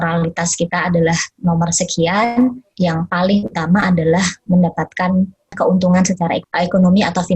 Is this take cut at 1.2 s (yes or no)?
no